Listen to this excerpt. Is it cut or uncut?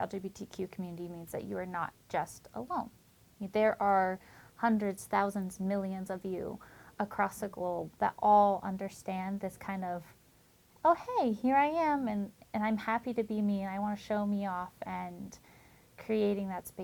uncut